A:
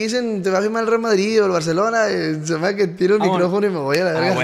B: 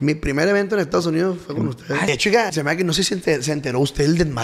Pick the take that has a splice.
B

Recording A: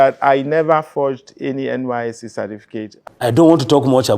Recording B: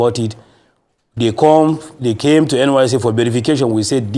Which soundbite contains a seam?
A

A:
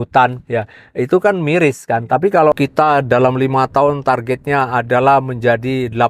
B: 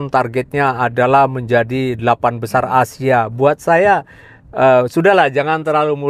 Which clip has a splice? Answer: A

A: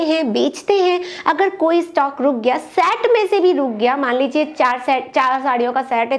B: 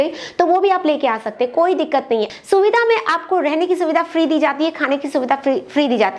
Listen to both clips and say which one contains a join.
B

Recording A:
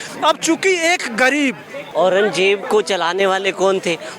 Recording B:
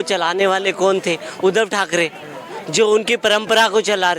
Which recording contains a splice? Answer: A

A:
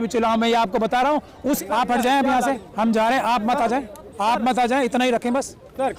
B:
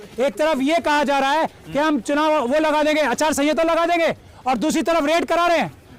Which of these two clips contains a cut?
A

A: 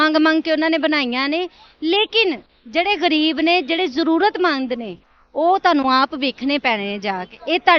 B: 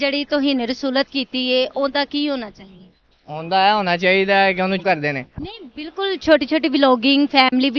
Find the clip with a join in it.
B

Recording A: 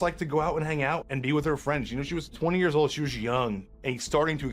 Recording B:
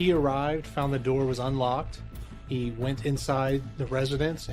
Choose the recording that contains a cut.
A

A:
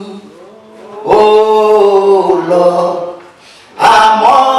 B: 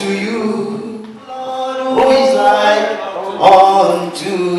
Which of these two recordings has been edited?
B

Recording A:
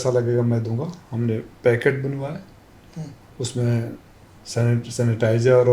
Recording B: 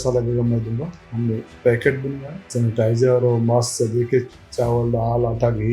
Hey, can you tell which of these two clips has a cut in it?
B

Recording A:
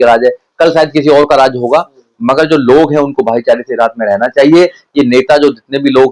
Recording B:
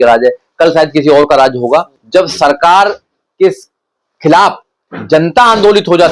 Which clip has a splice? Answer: B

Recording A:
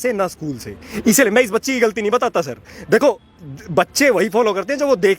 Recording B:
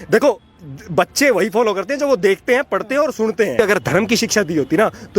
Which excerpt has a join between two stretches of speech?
B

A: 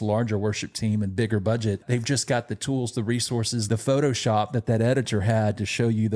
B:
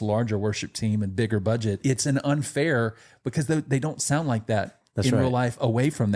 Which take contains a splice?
A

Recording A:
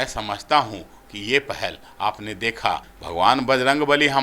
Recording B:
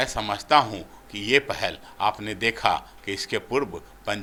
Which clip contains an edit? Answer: A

